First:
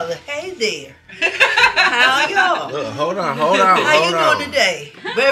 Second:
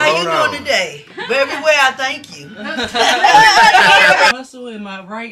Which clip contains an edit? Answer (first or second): second